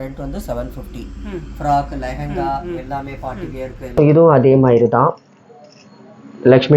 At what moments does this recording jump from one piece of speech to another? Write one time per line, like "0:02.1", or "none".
0:04.0